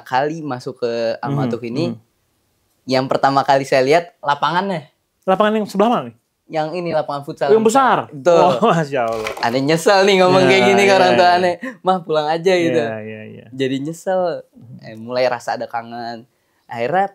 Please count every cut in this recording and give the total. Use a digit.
1